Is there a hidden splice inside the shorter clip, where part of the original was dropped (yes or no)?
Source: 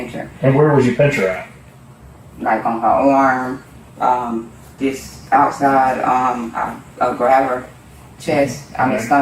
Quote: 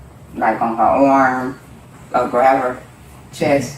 yes